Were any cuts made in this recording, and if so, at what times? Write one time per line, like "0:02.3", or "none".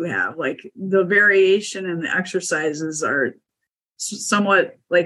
none